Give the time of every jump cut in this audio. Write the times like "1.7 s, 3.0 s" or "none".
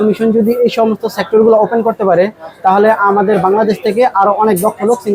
none